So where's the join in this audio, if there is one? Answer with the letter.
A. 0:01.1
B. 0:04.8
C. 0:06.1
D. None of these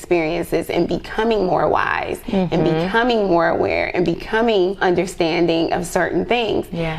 B